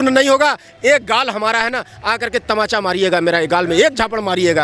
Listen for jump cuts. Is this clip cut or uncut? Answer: uncut